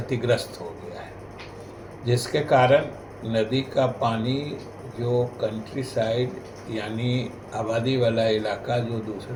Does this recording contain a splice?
no; 0 cuts

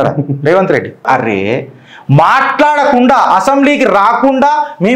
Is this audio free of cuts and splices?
no; 1 cut; at 1.1 s

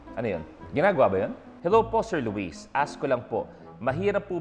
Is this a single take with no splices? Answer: no; 1 cut; at 1.5 s

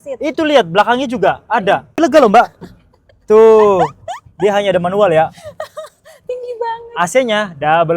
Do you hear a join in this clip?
yes; 1 cut; at 2.0 s

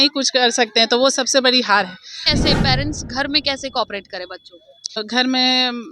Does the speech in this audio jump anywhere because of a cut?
yes; 2 cuts; at 2.2 s, 5.0 s

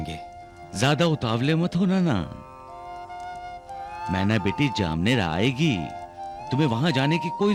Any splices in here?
no; 0 cuts

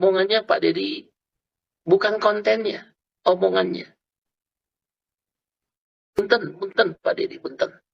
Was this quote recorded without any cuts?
yes; 0 cuts

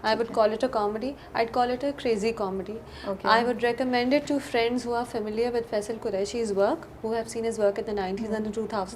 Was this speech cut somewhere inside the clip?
no; 0 cuts

